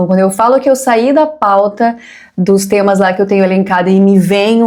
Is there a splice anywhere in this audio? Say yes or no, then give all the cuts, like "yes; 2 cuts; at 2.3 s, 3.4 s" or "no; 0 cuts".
no; 0 cuts